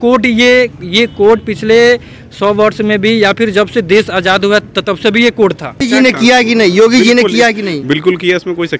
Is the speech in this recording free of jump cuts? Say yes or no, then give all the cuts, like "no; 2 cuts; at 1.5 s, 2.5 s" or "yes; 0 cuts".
no; 1 cut; at 5.8 s